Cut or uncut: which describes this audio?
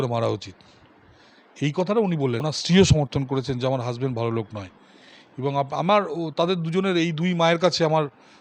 cut